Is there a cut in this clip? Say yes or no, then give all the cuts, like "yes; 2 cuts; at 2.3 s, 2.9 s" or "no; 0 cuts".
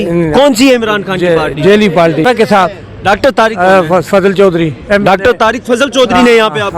yes; 1 cut; at 2.2 s